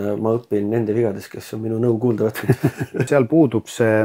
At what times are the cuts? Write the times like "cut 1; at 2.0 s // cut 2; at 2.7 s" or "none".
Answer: cut 1; at 3.1 s

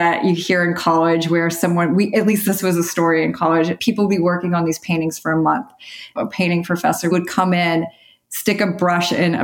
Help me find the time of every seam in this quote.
cut 1; at 2.4 s // cut 2; at 3.8 s // cut 3; at 6.1 s // cut 4; at 7.1 s

